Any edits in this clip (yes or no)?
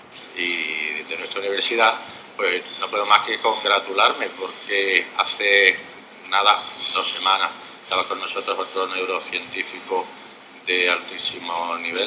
yes